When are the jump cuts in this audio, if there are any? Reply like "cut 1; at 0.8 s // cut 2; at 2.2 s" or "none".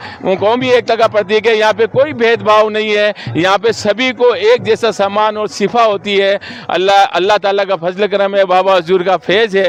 none